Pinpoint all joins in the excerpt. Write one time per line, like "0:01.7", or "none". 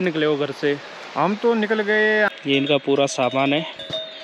0:02.8